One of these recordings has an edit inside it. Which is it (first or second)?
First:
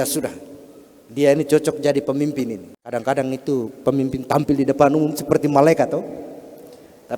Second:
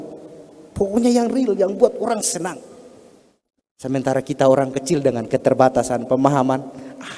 first